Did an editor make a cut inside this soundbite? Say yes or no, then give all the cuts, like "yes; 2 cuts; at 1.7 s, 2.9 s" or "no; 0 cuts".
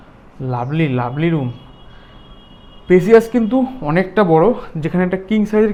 no; 0 cuts